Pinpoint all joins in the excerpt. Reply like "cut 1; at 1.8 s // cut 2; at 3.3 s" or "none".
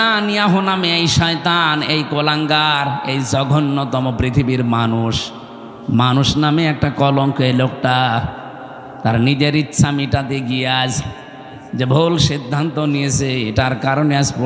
none